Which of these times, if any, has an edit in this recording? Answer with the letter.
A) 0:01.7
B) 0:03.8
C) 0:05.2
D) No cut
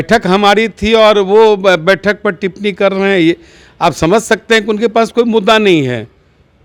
D